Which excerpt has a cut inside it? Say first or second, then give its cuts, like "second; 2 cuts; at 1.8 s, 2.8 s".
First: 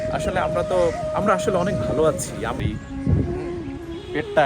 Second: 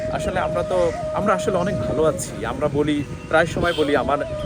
first; 1 cut; at 2.6 s